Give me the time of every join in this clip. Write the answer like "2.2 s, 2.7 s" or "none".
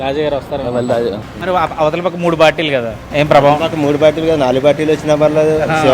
1.3 s